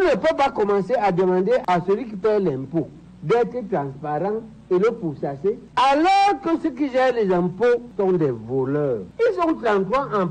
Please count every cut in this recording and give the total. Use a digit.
3